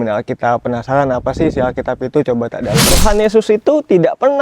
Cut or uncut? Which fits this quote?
cut